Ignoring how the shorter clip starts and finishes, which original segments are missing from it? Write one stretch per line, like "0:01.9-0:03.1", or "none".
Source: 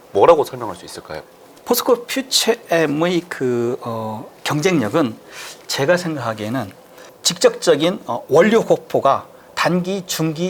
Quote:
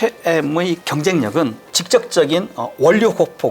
0:03.3-0:04.4
0:05.3-0:07.2